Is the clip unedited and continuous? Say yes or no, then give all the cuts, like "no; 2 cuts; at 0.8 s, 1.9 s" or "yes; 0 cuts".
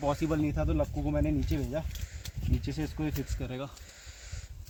yes; 0 cuts